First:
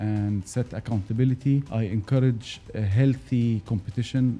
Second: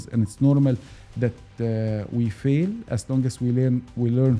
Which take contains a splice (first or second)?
first